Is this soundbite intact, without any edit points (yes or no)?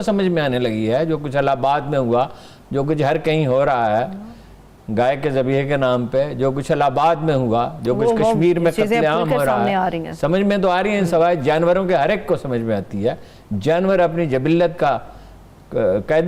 yes